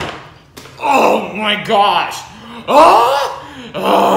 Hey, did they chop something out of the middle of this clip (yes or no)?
no